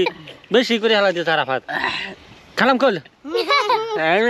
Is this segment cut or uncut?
uncut